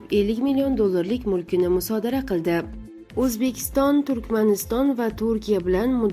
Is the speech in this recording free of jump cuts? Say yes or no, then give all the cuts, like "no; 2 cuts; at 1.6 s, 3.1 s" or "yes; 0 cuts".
no; 1 cut; at 2.8 s